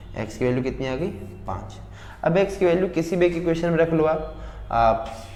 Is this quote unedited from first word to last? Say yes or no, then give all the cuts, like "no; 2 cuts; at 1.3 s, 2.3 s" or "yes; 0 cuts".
yes; 0 cuts